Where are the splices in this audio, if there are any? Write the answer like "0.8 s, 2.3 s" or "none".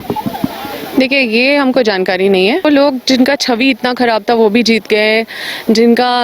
2.6 s